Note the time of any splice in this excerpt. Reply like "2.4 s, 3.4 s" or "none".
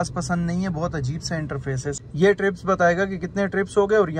2.0 s